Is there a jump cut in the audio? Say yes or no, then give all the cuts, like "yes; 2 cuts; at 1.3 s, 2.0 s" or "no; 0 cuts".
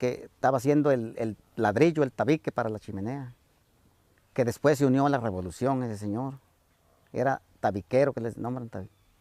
no; 0 cuts